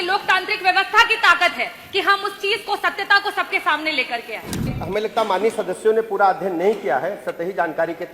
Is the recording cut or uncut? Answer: cut